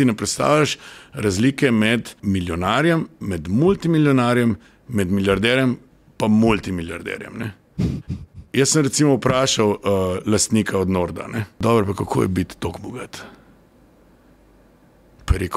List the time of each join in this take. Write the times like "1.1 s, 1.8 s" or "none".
2.1 s, 11.5 s